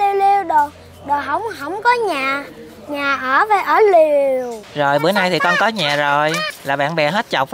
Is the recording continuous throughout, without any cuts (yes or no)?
no